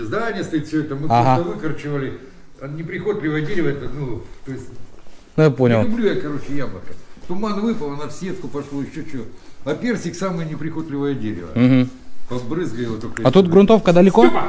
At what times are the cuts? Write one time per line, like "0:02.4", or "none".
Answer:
none